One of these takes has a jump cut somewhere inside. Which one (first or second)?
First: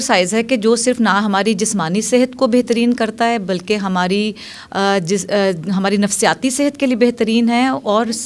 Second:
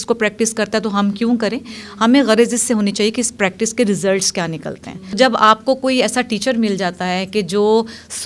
second